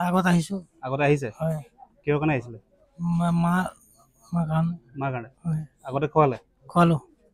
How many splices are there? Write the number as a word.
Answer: zero